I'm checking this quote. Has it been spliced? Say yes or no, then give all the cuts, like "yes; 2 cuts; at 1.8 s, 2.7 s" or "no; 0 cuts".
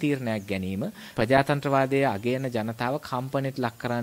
yes; 1 cut; at 1.1 s